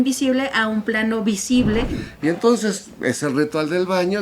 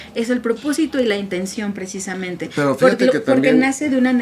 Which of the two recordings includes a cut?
first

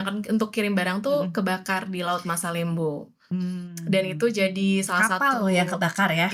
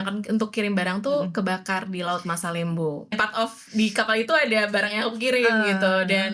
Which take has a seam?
second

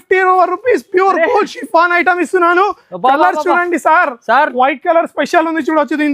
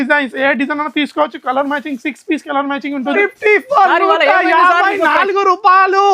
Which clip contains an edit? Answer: second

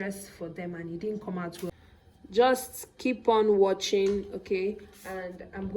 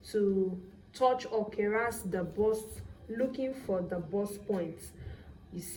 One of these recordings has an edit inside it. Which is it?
first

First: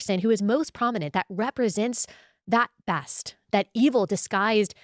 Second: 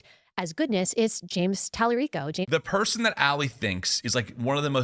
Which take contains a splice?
second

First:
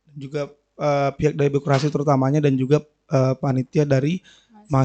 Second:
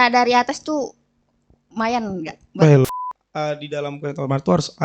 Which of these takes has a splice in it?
second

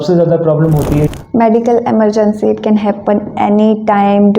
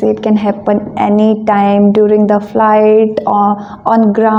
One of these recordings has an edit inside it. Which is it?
first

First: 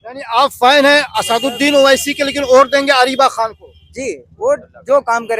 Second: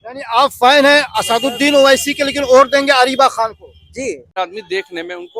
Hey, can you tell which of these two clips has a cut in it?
second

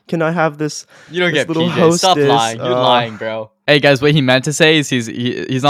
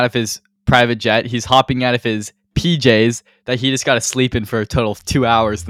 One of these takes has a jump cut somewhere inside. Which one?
first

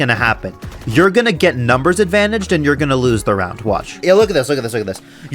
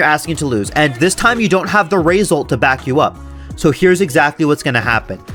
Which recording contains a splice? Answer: first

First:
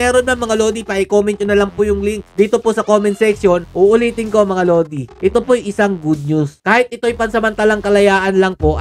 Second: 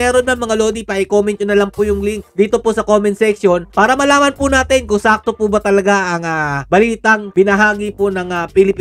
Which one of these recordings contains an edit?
first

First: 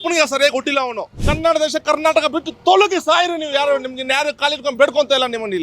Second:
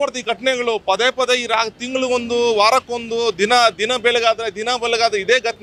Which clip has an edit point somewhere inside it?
first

